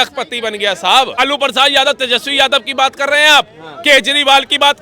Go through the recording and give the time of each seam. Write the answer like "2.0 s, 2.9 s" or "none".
1.2 s